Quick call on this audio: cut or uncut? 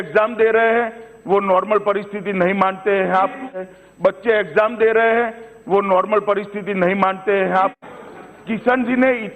cut